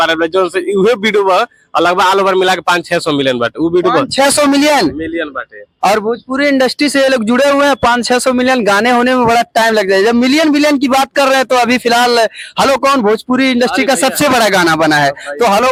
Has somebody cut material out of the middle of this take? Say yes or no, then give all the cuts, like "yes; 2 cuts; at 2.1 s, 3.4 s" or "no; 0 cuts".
no; 0 cuts